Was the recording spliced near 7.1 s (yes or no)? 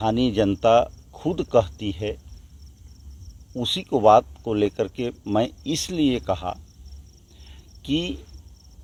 no